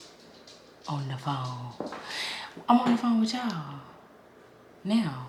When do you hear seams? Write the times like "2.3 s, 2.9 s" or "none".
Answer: none